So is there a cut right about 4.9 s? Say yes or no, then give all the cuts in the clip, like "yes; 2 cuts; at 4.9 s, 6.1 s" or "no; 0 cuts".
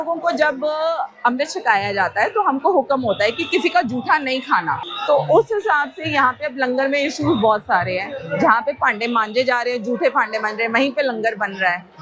yes; 1 cut; at 4.9 s